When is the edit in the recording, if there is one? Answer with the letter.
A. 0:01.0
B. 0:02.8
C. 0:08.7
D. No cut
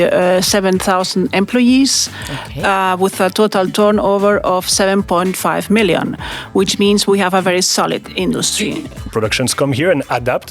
C